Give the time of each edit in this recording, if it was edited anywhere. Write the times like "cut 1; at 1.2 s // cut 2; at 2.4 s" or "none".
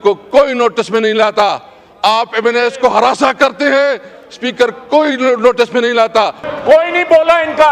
cut 1; at 6.5 s